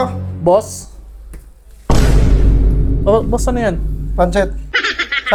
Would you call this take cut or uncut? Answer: uncut